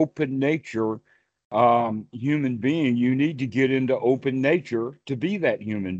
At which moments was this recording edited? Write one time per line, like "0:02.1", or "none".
none